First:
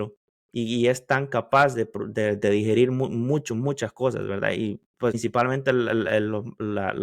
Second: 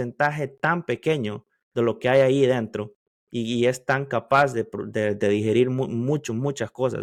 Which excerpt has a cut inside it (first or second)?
first